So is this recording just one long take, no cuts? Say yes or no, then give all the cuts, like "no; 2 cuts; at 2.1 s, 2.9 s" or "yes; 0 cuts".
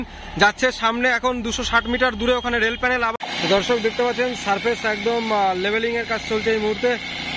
no; 1 cut; at 3.1 s